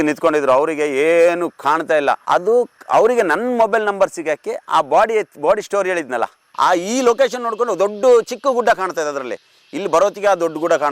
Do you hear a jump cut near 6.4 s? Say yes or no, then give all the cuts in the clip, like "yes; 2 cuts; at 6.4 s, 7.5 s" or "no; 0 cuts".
yes; 1 cut; at 6.4 s